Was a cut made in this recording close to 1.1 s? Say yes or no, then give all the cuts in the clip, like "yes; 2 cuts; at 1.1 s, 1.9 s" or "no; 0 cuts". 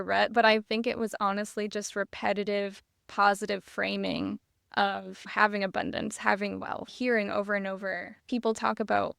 no; 3 cuts; at 5.2 s, 6.9 s, 8.1 s